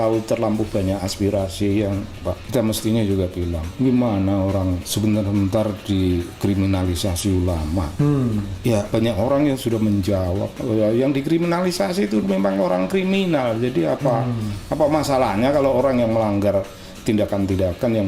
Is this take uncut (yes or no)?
no